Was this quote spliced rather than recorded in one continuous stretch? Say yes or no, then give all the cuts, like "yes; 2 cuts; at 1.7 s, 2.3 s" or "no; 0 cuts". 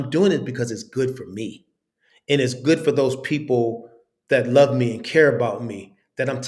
no; 0 cuts